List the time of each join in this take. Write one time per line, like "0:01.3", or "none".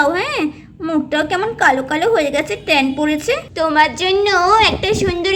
0:03.4